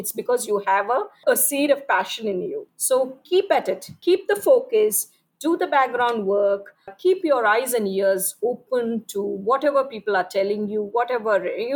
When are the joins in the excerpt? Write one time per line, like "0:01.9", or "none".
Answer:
0:02.7
0:03.9